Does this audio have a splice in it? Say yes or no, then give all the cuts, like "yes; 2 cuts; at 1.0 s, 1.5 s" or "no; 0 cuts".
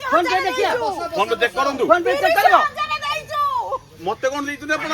no; 0 cuts